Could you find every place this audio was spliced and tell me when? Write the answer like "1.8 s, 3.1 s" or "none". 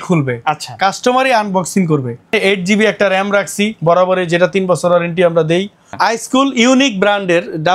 2.3 s, 5.8 s